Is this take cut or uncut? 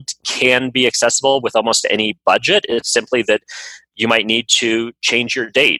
uncut